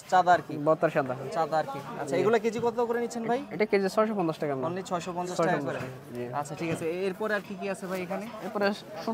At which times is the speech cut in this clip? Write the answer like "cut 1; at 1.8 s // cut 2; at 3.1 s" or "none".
none